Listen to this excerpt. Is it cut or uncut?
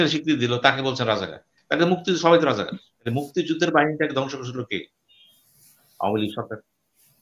cut